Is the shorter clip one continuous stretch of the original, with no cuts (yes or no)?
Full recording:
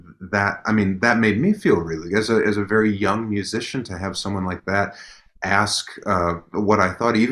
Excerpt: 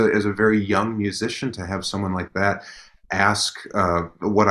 yes